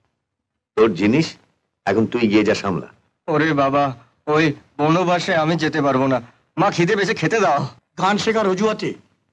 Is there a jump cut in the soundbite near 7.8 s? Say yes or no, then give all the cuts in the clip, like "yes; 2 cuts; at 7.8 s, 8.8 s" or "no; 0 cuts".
yes; 1 cut; at 7.8 s